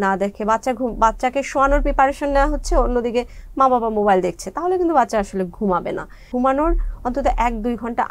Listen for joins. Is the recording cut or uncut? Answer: cut